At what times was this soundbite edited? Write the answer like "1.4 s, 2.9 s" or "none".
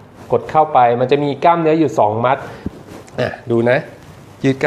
2.6 s

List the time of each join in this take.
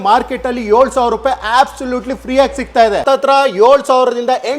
3.0 s

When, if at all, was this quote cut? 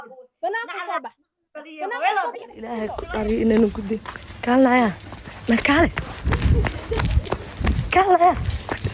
3.0 s

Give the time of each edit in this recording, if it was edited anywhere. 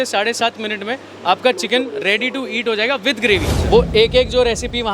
3.5 s

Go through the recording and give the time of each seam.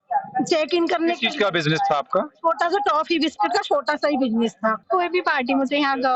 4.8 s

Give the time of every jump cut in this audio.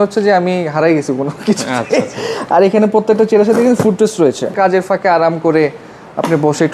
4.5 s

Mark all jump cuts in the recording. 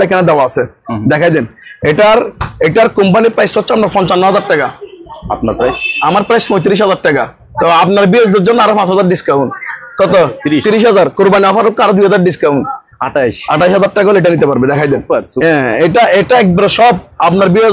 none

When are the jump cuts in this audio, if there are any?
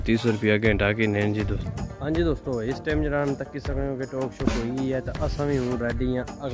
1.6 s

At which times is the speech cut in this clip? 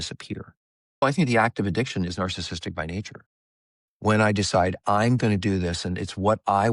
1.0 s

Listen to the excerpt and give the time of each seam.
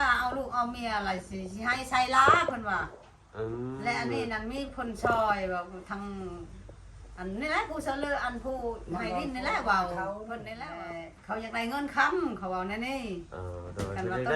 10.6 s

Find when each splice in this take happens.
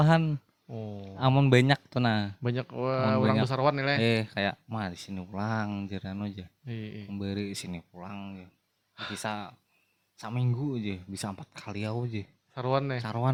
none

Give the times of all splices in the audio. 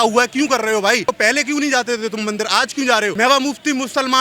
1.1 s, 3.1 s

